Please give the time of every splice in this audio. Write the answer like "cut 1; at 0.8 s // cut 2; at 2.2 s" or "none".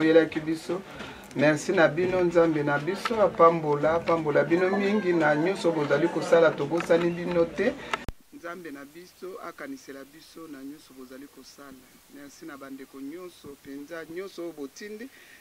none